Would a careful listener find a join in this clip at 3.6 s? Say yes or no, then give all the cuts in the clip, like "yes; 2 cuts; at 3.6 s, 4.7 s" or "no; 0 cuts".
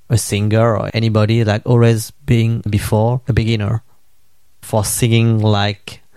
no; 0 cuts